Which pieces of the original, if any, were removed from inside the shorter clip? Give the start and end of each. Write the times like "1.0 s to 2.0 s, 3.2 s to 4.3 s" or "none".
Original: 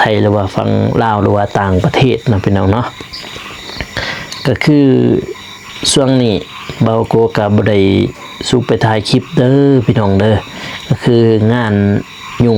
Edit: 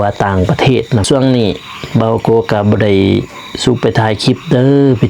2.4 s to 5.9 s